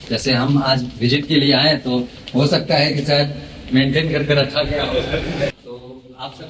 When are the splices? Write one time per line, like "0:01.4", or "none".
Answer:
0:05.5